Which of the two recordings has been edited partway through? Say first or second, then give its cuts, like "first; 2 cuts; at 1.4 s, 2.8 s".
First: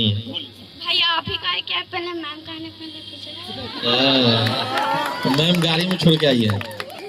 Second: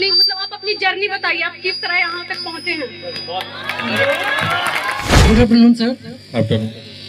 second; 1 cut; at 5.1 s